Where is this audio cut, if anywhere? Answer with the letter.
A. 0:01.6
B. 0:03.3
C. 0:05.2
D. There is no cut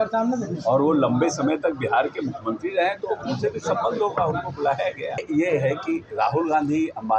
C